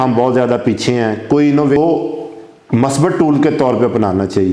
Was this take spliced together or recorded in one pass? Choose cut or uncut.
cut